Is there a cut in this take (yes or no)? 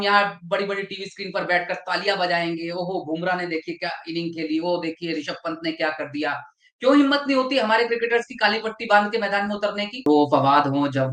yes